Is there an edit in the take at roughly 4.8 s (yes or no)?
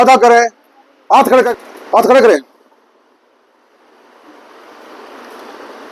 no